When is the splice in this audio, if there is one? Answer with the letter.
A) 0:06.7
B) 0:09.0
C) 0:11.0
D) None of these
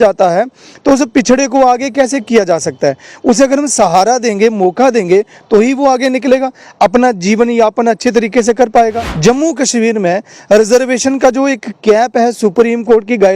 B